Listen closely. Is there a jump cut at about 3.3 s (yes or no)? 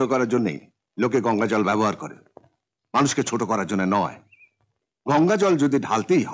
no